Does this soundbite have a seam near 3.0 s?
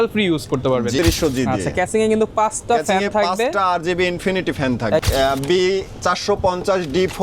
no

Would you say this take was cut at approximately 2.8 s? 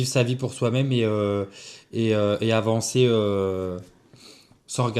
no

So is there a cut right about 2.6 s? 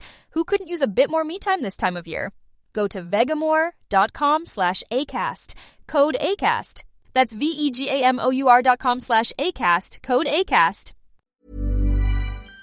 no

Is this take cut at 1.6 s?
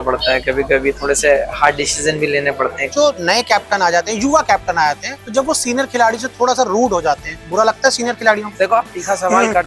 no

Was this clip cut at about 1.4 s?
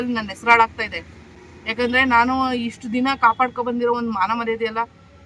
no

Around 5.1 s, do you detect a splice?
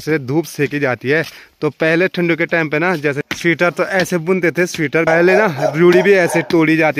yes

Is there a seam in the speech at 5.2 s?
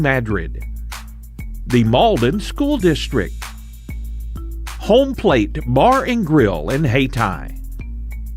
no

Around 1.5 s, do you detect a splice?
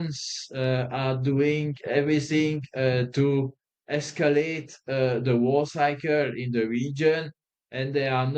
no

